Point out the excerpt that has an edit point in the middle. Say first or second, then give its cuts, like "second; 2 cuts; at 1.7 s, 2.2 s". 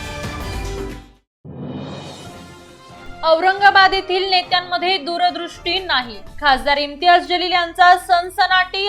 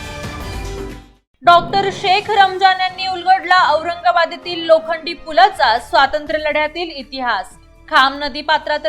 first; 2 cuts; at 1.2 s, 2.7 s